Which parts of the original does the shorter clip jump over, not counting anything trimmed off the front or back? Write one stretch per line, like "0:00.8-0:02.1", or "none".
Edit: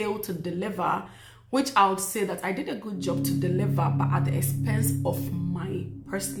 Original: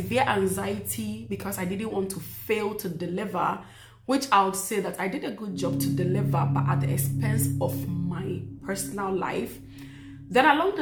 none